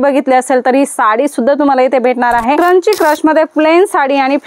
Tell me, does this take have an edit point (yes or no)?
yes